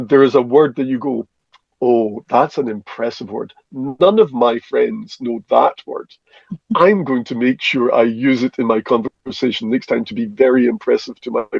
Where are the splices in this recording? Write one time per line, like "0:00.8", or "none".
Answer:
none